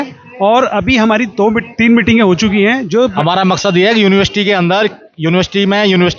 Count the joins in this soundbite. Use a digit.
1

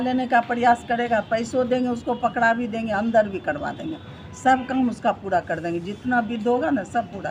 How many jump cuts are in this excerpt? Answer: 0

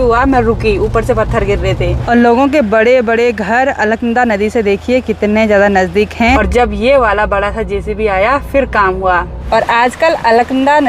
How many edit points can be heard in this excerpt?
3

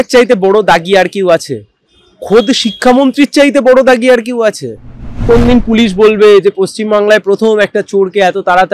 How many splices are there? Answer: 1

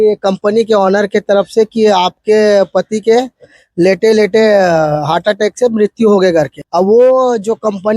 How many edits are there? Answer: 1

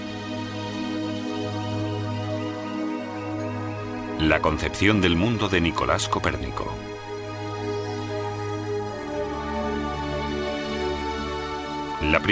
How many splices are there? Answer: 1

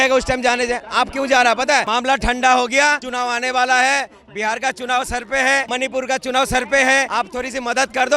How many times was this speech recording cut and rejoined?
4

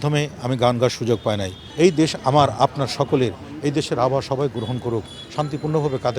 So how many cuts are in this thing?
1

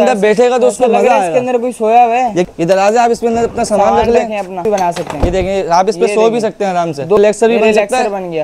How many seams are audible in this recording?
3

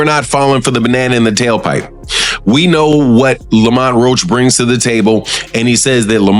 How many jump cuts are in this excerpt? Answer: 0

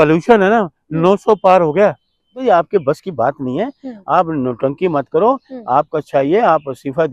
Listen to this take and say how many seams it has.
1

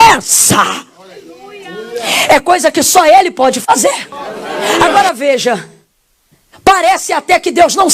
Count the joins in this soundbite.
1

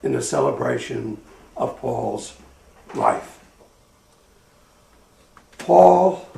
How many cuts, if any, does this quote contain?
1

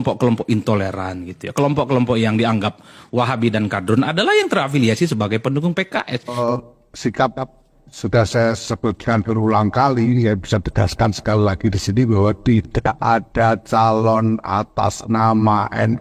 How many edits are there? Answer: 1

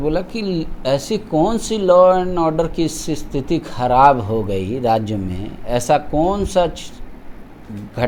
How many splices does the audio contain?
0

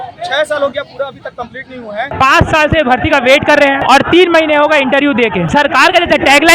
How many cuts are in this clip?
3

